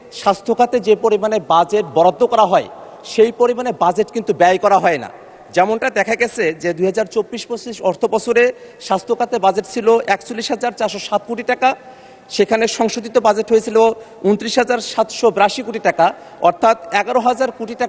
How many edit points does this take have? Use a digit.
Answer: 0